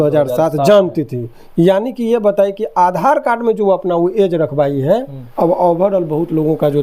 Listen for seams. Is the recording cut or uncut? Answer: cut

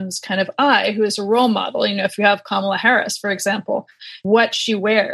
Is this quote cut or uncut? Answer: cut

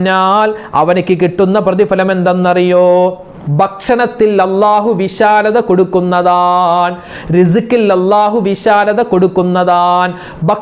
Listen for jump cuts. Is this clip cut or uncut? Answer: uncut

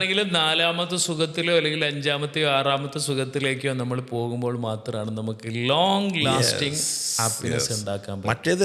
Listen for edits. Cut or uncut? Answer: uncut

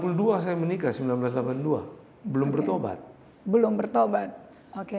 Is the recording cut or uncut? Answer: uncut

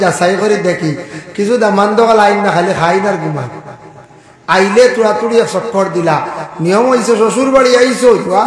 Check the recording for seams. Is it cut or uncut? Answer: uncut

